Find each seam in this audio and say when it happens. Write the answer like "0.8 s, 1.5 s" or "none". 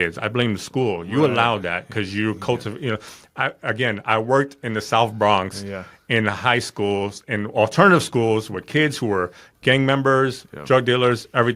none